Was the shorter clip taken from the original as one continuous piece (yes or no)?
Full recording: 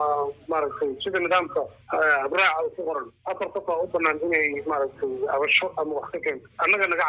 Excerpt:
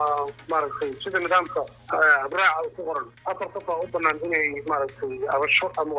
yes